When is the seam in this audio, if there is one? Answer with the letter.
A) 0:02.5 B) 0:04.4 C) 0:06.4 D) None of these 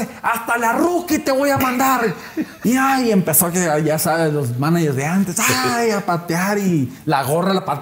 A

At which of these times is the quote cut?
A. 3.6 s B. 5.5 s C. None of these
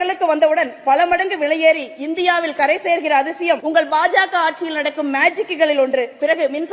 A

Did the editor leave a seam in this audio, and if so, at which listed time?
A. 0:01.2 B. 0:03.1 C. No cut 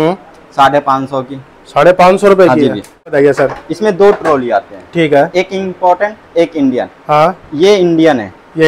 B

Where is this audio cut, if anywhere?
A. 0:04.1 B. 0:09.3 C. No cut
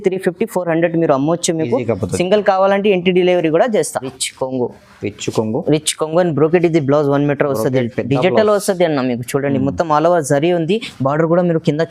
A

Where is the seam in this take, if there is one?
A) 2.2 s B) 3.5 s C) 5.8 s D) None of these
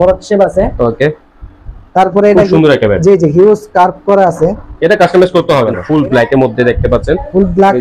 C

